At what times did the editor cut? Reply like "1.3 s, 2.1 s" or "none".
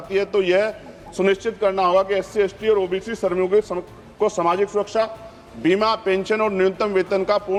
none

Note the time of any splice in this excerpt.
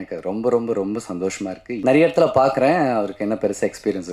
1.7 s

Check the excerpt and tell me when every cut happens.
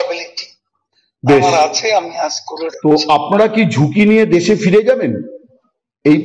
none

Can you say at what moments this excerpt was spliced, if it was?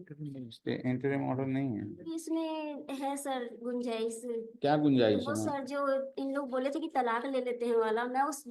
2.1 s

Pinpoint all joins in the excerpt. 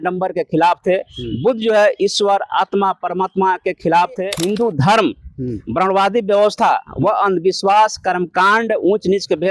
4.3 s

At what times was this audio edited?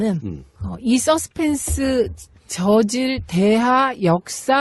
3.6 s

